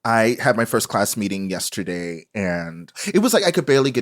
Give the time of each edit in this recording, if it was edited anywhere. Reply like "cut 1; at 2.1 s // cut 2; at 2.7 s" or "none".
cut 1; at 3.0 s